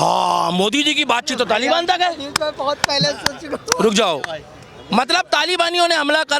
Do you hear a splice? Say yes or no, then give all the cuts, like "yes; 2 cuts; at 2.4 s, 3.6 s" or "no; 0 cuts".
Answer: no; 0 cuts